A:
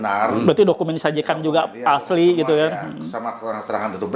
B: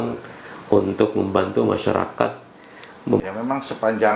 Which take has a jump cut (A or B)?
B